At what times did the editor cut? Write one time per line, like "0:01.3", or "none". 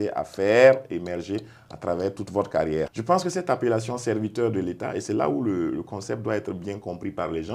0:02.9